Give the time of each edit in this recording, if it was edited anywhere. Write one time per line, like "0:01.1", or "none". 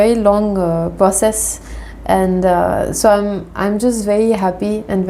none